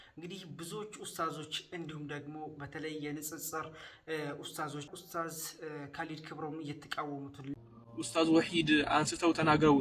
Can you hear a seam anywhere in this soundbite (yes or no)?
yes